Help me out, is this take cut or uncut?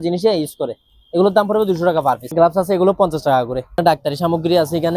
cut